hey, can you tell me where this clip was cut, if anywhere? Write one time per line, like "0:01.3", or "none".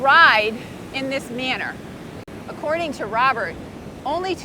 0:02.3